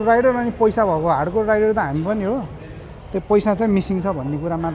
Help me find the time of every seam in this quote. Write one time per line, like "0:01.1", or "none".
none